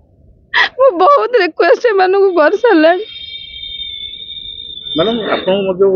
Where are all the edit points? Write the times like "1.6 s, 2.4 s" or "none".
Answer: none